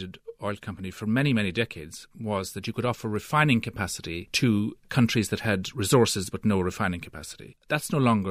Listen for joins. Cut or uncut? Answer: uncut